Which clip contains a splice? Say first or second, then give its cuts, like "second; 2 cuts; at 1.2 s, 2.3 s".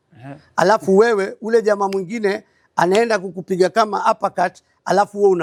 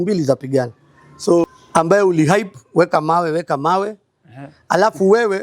second; 1 cut; at 1.4 s